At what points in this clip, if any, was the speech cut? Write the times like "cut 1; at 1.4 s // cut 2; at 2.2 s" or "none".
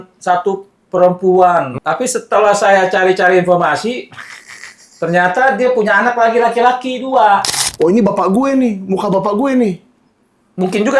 cut 1; at 1.8 s // cut 2; at 7.6 s